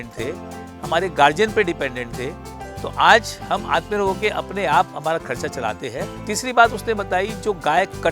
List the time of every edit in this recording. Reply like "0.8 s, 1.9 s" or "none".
6.1 s